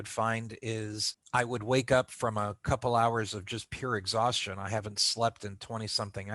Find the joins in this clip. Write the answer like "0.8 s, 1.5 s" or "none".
1.1 s